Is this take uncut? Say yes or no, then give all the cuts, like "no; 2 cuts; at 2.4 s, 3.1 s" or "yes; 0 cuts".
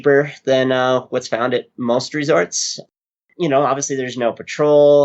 no; 1 cut; at 3.2 s